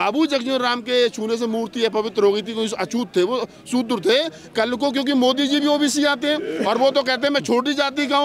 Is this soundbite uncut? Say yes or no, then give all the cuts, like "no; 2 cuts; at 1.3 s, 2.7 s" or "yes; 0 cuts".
yes; 0 cuts